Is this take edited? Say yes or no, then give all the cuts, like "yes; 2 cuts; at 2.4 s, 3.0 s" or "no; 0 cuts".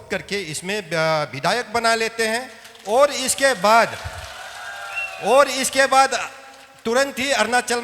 no; 0 cuts